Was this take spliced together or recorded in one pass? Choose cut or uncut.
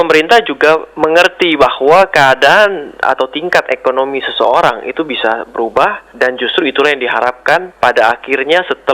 uncut